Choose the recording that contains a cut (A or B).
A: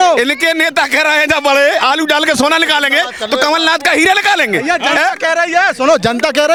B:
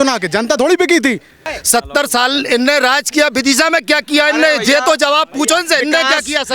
B